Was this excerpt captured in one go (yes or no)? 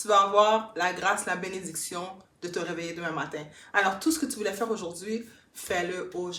yes